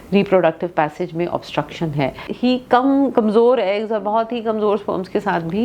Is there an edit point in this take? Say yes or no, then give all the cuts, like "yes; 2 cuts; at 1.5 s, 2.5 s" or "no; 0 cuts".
yes; 1 cut; at 2.2 s